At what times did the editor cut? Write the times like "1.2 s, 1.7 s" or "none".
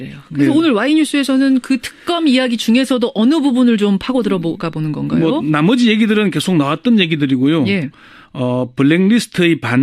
3.6 s